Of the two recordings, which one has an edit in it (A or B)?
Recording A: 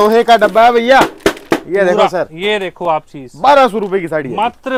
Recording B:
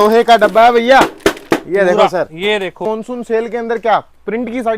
B